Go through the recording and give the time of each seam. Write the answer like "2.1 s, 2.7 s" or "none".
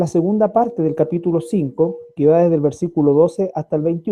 2.6 s